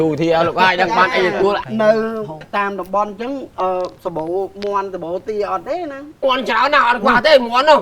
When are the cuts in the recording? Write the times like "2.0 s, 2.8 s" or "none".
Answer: 1.7 s, 6.2 s